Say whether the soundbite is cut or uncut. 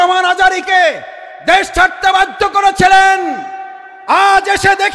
uncut